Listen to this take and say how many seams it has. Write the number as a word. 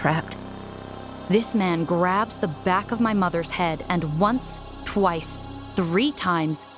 one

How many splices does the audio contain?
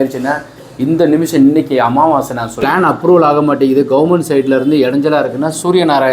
one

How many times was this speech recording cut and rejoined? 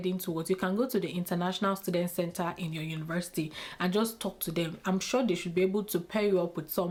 zero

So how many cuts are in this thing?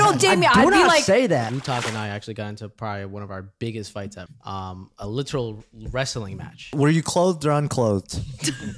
three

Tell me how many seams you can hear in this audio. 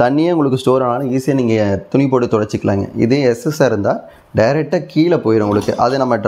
zero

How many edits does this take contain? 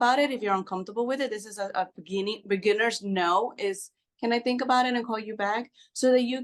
zero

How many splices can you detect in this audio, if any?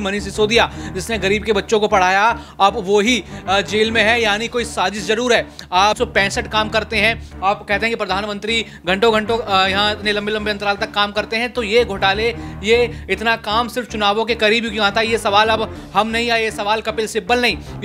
one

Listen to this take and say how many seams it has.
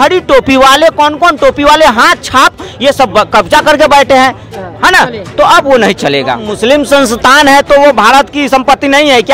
one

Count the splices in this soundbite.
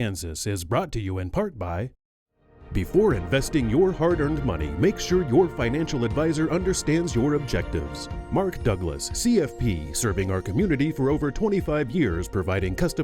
one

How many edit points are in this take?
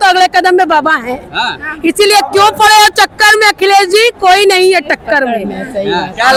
zero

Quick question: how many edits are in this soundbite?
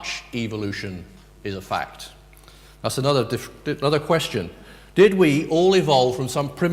one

